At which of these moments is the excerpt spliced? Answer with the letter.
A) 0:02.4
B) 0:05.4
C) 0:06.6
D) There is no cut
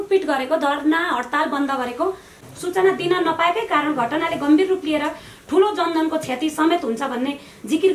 A